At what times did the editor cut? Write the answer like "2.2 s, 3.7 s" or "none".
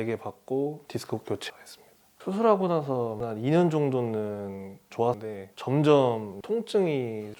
5.2 s